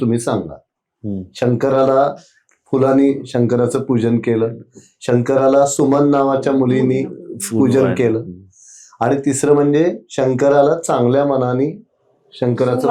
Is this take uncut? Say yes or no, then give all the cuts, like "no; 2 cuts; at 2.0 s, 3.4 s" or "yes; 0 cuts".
yes; 0 cuts